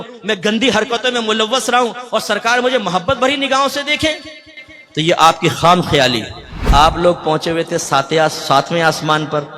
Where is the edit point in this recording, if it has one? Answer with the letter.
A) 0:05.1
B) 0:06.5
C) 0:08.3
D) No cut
B